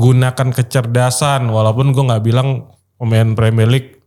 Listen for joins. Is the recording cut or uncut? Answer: uncut